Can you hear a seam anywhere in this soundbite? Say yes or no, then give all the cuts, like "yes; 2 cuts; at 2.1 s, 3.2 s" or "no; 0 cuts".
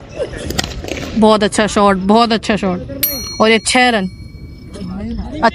no; 0 cuts